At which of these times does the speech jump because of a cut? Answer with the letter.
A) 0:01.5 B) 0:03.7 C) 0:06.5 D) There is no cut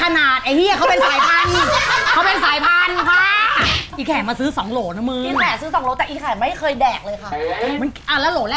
B